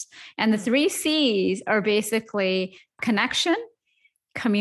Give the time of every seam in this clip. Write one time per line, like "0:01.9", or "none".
0:02.9